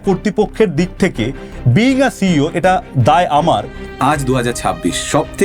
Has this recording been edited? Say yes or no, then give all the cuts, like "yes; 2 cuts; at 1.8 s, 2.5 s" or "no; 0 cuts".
yes; 1 cut; at 3.8 s